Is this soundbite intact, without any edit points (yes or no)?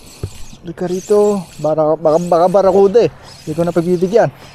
yes